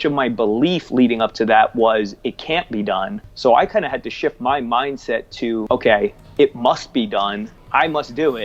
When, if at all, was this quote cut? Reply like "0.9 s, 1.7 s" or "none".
3.2 s, 5.6 s, 7.5 s